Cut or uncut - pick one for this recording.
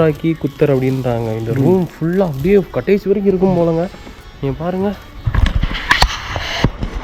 uncut